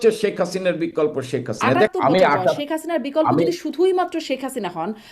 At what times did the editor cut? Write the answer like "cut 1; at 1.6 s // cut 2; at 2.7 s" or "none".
cut 1; at 1.9 s